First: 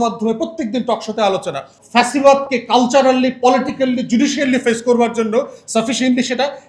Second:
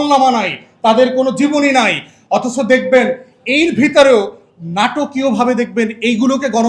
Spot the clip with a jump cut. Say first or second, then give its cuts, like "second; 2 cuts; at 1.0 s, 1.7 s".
first; 1 cut; at 1.7 s